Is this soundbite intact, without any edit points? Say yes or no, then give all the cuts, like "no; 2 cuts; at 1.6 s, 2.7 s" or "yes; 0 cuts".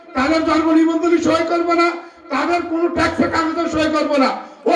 yes; 0 cuts